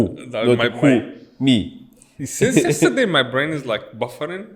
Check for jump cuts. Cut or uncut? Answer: uncut